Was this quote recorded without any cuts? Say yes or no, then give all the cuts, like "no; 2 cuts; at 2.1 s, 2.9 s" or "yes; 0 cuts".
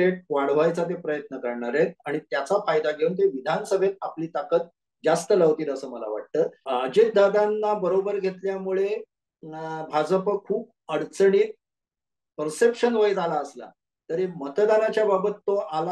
yes; 0 cuts